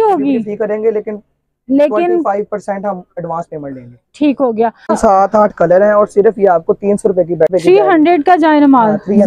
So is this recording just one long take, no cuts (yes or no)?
no